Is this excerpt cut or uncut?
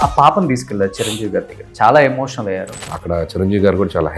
cut